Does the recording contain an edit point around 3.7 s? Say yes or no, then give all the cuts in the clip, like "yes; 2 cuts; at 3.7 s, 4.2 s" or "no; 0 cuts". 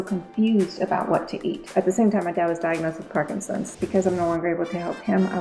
yes; 2 cuts; at 1.6 s, 3.7 s